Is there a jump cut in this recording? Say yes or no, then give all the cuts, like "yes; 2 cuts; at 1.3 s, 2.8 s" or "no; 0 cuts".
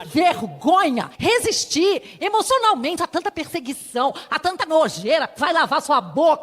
yes; 1 cut; at 1.1 s